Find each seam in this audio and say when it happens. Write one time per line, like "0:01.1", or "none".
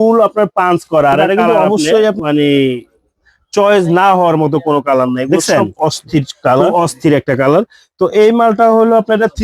0:02.2
0:06.7